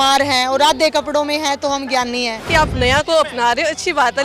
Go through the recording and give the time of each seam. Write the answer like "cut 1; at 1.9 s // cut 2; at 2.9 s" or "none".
cut 1; at 2.4 s